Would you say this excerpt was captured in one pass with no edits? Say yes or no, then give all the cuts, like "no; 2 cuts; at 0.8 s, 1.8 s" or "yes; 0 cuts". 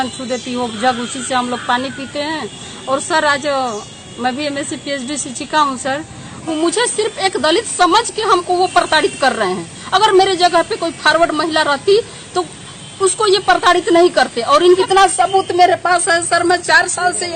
no; 2 cuts; at 6.5 s, 14.4 s